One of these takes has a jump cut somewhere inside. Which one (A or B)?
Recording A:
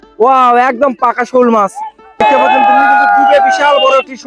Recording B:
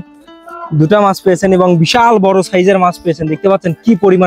A